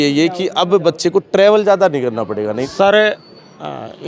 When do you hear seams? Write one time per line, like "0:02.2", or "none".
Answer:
0:02.6